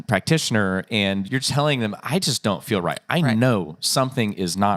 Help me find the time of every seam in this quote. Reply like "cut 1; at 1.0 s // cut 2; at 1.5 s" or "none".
cut 1; at 1.3 s